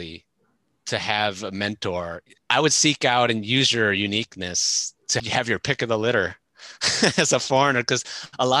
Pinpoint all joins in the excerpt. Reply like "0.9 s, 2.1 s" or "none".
2.2 s, 5.2 s